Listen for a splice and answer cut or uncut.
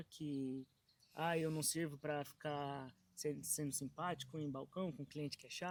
uncut